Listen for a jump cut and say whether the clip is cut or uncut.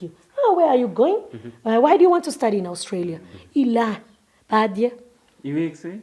uncut